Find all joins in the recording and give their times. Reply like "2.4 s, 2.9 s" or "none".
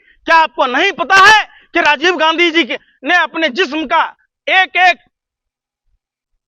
none

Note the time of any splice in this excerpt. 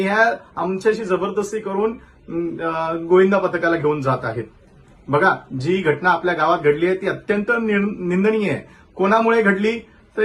none

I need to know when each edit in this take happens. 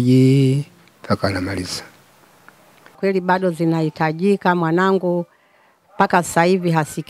3.0 s

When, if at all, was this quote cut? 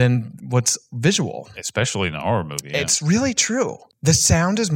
3.9 s

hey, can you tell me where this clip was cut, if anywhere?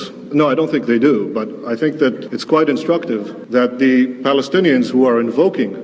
2.3 s, 3.3 s

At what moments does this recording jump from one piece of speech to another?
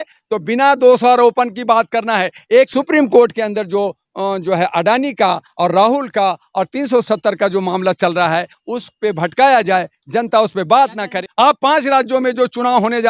2.7 s, 11.2 s

